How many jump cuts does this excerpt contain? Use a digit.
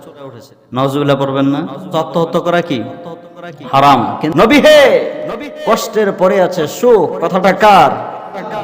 2